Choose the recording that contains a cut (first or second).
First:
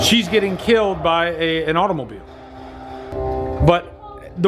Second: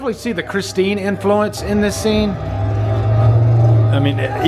first